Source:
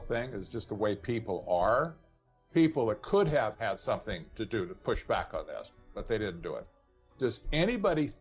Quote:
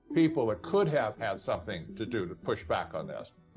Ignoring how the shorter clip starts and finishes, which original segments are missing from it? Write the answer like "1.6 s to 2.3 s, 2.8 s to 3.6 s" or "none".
none

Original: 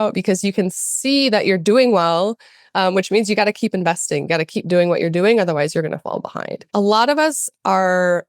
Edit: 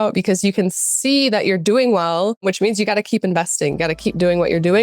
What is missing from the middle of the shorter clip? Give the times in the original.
2.4 s to 2.9 s

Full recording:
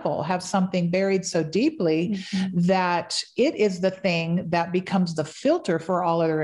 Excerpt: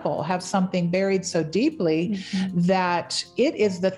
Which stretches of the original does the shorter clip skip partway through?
none

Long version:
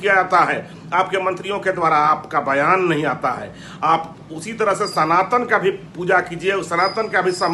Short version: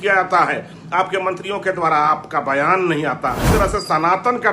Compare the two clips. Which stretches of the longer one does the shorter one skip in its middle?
3.4 s to 4.5 s

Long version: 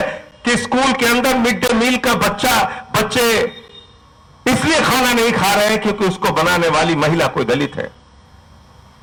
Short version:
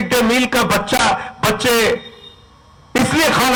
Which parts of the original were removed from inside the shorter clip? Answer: none

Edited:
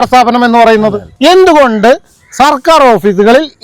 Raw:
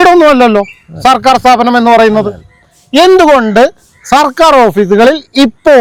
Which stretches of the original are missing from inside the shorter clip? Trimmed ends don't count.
2.4 s to 2.8 s

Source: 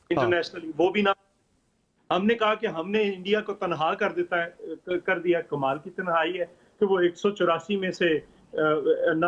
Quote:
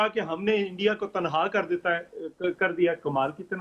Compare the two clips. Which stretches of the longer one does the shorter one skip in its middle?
none

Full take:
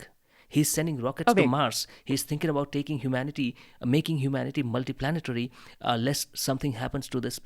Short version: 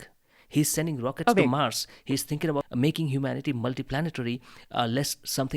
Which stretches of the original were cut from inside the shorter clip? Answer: 2.7 s to 3.8 s

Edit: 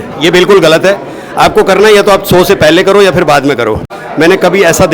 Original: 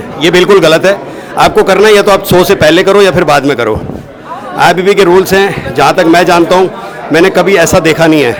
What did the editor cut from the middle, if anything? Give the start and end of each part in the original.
4.0 s to 6.9 s

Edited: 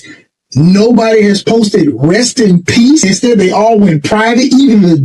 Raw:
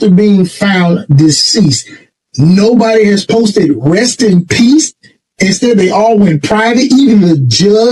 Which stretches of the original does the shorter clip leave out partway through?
4.8 s to 5.4 s

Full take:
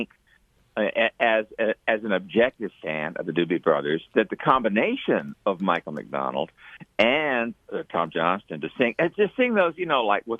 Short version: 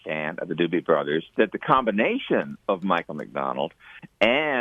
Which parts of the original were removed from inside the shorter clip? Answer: none

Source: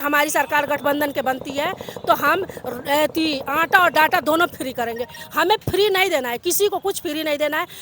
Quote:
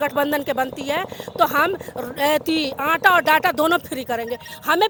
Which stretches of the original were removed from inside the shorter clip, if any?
none

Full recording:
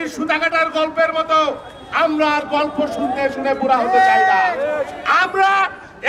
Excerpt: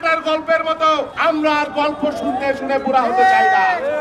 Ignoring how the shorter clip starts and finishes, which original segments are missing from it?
1.6 s to 1.9 s

